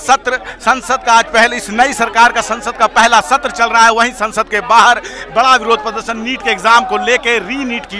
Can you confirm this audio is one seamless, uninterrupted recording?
yes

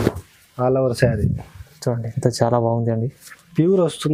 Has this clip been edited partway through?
no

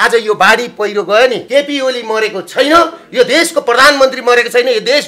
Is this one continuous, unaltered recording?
no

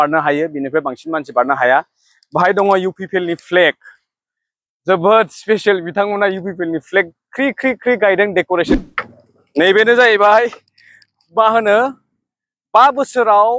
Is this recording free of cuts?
no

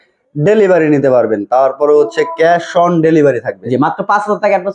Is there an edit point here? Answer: no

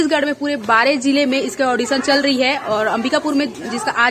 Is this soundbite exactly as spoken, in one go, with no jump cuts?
yes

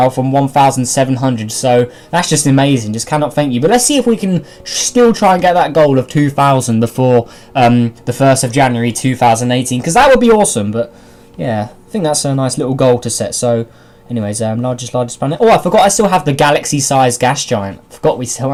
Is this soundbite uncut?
yes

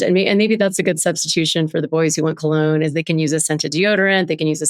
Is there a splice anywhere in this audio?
no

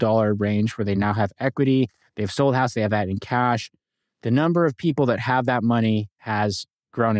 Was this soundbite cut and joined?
no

